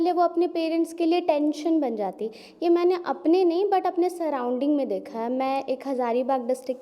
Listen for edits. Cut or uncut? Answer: uncut